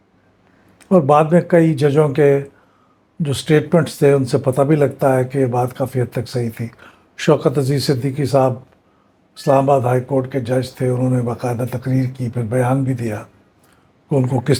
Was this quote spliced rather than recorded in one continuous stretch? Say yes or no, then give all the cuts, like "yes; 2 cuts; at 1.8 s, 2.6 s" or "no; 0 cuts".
no; 0 cuts